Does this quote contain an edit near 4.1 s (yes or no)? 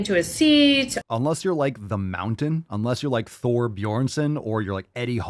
no